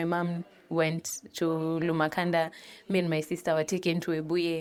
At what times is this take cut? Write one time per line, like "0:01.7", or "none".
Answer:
none